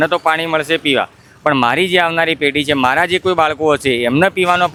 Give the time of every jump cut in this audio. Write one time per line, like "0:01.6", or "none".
none